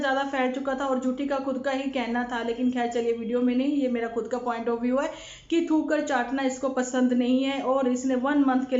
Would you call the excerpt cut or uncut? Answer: uncut